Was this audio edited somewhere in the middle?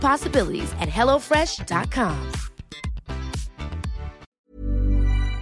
yes; 1 cut; at 4.2 s

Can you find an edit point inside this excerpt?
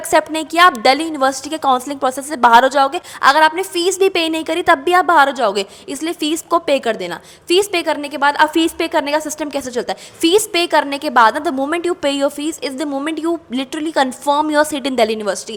no; 0 cuts

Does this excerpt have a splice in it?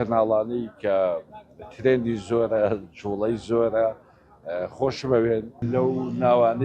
yes; 1 cut; at 5.7 s

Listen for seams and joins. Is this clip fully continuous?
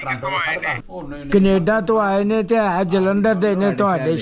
yes; 0 cuts

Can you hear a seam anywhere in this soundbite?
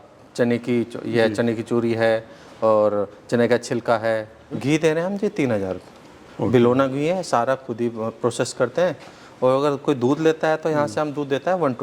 yes; 1 cut; at 4.5 s

